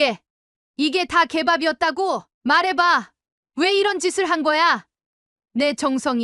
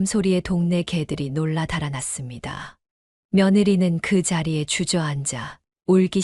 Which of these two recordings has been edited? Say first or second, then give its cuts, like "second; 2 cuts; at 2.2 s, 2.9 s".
first; 1 cut; at 2.3 s